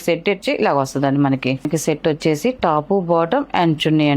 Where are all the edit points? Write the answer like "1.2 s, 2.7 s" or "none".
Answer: 1.7 s